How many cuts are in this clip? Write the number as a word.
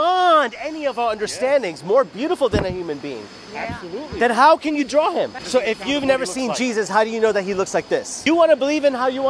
two